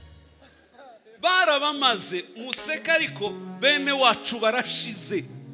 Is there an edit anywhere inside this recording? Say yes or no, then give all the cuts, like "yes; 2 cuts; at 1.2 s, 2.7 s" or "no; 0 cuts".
no; 0 cuts